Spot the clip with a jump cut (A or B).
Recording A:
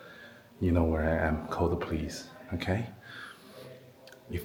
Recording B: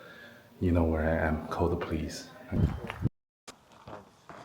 B